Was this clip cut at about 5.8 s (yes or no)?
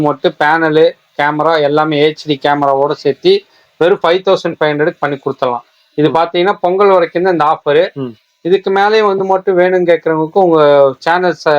no